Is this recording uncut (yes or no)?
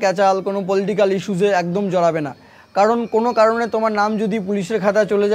yes